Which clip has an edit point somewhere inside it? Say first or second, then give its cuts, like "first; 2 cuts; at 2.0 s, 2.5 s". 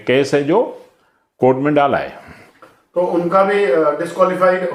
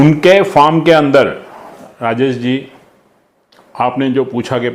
second; 1 cut; at 1.9 s